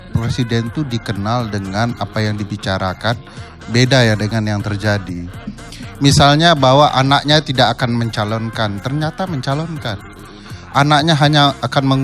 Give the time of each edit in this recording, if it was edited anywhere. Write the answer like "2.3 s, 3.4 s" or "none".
none